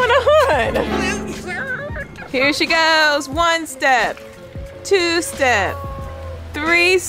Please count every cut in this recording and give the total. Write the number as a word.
one